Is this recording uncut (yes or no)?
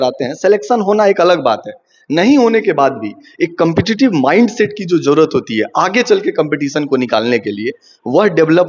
yes